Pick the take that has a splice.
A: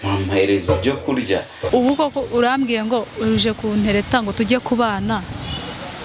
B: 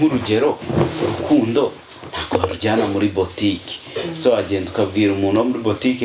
A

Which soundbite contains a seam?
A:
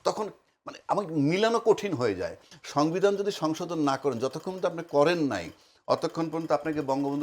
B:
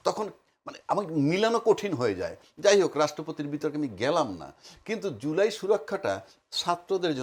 A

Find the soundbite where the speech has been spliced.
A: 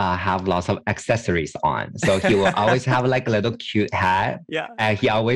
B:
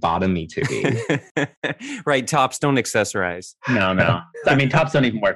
B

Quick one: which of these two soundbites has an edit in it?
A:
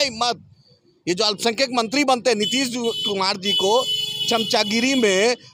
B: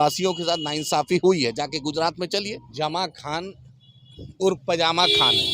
B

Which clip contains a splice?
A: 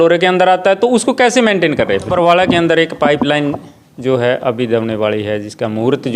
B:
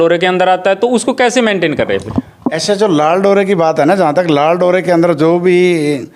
A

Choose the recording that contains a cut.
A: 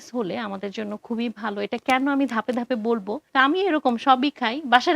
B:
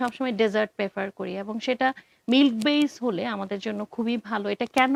A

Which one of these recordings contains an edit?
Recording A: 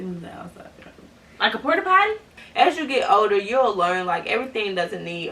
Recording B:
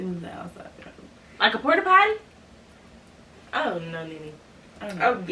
A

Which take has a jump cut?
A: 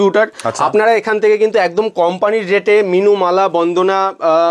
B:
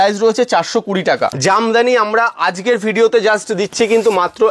B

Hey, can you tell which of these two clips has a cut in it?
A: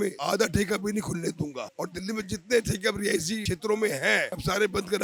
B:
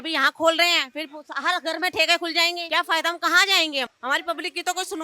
B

